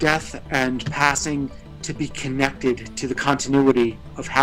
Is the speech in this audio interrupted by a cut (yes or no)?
no